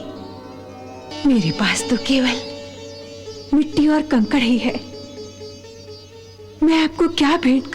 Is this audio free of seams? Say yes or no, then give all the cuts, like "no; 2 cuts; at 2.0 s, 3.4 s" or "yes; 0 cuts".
no; 1 cut; at 1.1 s